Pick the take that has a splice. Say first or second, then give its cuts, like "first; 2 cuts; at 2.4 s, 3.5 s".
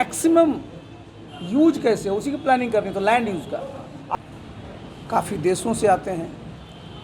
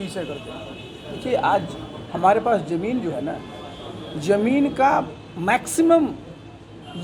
first; 1 cut; at 4.1 s